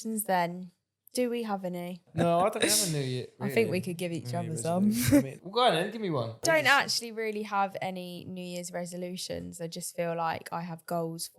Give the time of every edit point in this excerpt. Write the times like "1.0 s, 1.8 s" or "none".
2.1 s, 3.3 s, 5.4 s, 6.4 s